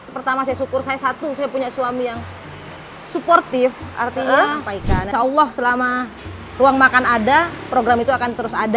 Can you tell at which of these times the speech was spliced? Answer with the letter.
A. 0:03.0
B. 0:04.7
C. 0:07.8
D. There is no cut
B